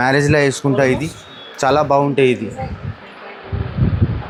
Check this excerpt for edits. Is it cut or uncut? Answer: uncut